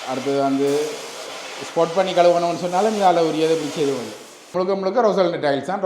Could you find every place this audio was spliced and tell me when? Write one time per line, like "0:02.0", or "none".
0:04.5

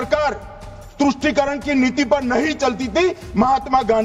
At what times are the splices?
none

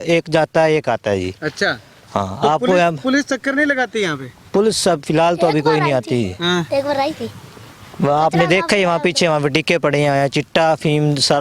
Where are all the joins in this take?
none

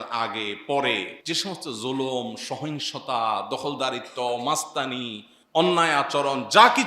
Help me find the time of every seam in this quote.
0:01.1

